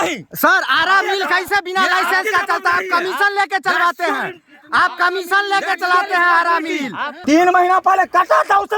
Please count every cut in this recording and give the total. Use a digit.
1